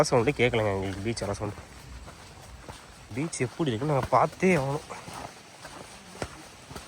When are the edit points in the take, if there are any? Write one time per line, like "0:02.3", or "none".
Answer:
0:03.1